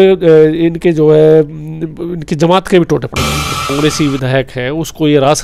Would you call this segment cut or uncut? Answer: cut